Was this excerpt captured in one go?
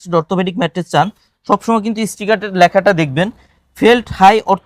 yes; 0 cuts

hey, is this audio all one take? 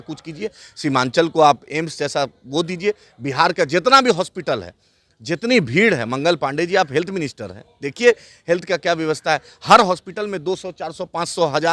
yes; 0 cuts

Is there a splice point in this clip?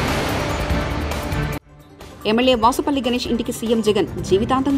no; 0 cuts

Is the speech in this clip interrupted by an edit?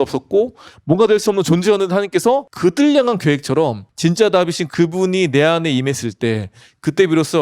yes; 2 cuts; at 2.5 s, 3.8 s

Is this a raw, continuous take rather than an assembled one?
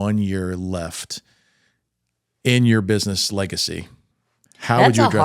yes; 0 cuts

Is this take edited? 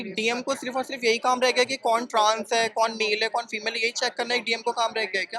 no; 0 cuts

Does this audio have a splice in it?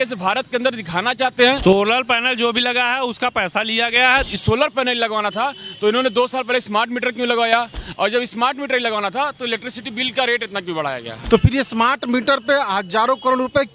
yes; 3 cuts; at 1.6 s, 4.3 s, 11.2 s

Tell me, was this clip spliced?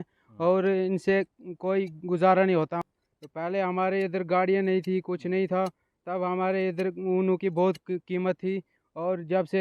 yes; 1 cut; at 2.8 s

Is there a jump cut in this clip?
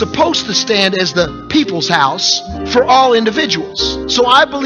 yes; 1 cut; at 1.4 s

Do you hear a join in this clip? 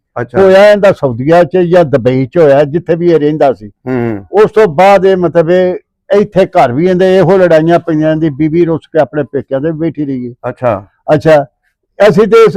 no; 0 cuts

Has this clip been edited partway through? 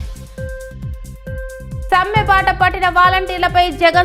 no; 0 cuts

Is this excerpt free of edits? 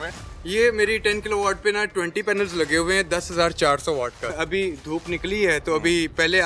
no; 1 cut; at 4.3 s

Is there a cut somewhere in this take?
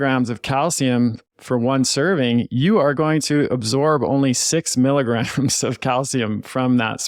no; 0 cuts

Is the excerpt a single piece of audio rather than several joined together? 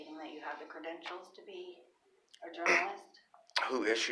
yes; 0 cuts

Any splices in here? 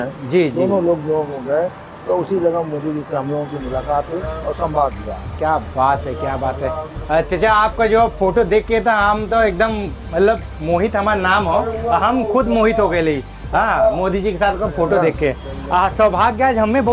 no; 0 cuts

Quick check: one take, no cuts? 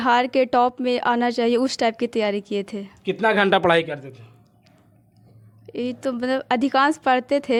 yes; 0 cuts

